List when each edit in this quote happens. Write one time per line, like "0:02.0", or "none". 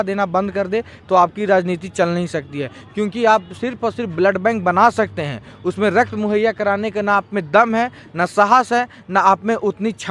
none